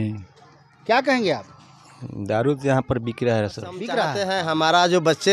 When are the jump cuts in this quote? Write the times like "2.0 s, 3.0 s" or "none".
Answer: 4.2 s